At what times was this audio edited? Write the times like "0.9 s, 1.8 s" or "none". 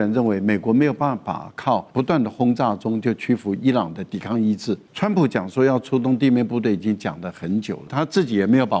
1.9 s, 4.9 s, 7.9 s